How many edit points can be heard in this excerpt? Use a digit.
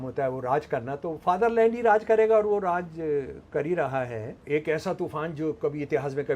1